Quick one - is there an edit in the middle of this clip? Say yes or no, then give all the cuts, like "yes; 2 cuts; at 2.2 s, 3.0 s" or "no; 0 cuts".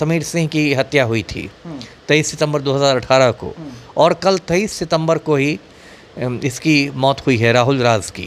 no; 0 cuts